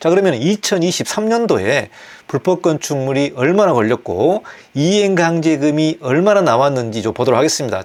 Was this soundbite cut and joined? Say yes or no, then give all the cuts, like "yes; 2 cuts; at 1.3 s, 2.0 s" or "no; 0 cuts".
no; 0 cuts